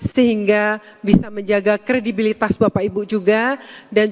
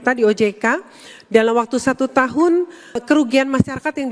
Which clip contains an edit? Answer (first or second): second